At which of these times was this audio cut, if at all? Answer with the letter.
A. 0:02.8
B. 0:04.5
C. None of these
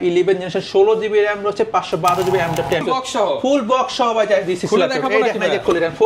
A